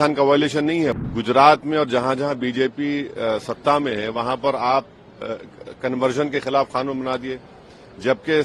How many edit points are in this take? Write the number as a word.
one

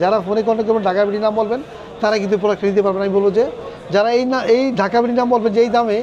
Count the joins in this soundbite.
zero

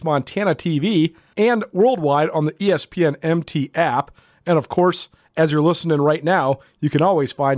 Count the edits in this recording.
one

